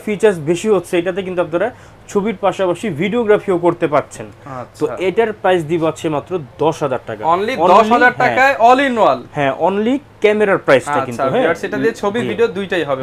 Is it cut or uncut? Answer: uncut